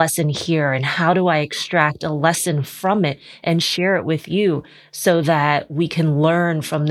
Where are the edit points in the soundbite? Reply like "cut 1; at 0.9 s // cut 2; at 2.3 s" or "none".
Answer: none